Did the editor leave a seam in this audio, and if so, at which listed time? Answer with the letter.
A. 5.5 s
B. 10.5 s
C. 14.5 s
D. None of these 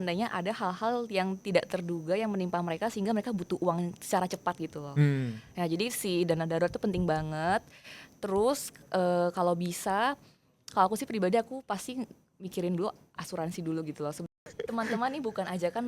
C